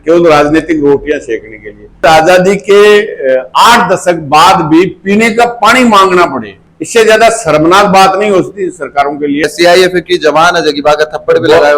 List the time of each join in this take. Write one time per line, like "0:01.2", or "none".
0:02.0
0:09.5